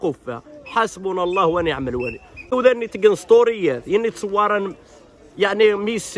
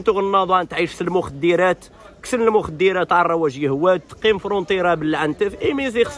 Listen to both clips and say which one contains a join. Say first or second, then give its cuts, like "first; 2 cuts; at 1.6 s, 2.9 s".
first; 1 cut; at 2.5 s